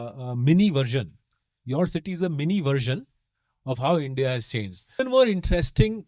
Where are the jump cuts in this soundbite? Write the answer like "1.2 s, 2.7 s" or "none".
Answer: 5.0 s